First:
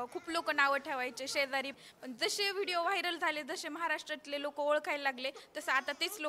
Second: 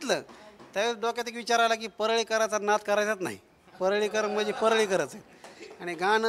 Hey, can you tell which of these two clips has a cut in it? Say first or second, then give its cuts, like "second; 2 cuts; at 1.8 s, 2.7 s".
first; 1 cut; at 1.7 s